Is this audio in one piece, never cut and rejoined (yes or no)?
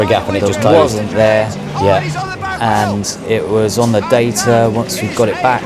yes